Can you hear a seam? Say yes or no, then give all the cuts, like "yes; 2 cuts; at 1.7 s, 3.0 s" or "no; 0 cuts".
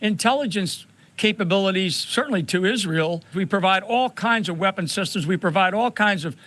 yes; 1 cut; at 3.3 s